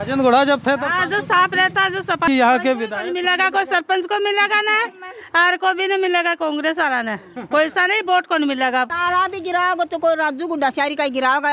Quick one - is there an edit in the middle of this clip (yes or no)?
yes